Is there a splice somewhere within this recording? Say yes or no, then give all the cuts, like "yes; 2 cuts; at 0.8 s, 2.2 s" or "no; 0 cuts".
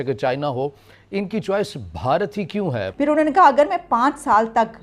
yes; 1 cut; at 2.9 s